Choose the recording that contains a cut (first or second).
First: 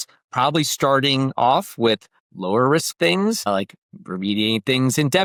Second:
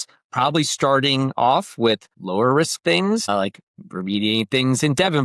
second